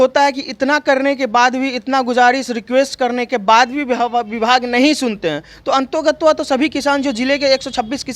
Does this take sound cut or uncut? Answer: uncut